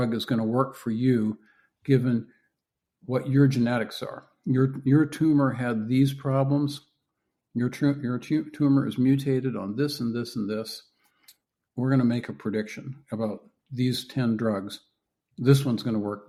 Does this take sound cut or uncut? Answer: uncut